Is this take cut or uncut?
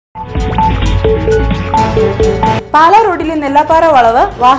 cut